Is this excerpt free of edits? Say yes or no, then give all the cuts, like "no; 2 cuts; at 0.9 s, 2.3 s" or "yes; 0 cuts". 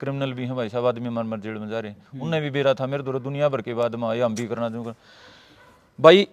yes; 0 cuts